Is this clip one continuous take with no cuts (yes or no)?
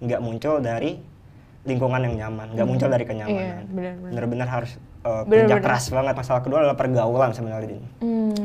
no